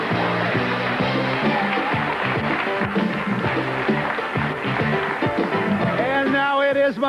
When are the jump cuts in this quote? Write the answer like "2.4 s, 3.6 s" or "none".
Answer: 2.8 s